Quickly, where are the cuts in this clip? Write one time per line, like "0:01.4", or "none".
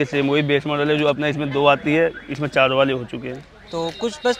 none

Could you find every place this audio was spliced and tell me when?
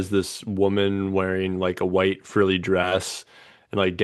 none

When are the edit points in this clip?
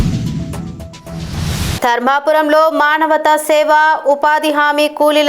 0:01.7

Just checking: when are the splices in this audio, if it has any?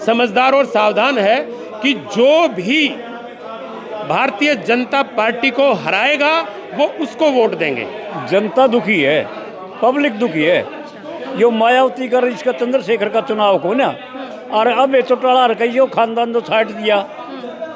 0:08.1

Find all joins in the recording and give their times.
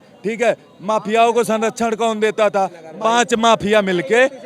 0:02.8

